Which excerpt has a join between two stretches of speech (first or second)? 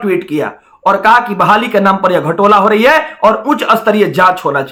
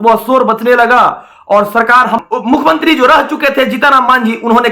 second